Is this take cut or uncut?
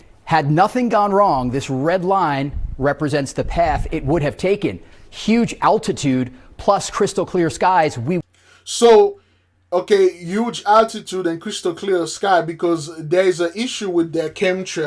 uncut